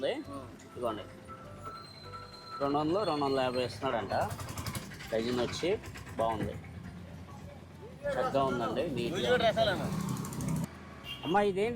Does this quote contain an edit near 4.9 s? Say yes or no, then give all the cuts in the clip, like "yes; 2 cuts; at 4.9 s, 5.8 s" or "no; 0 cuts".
no; 1 cut; at 10.6 s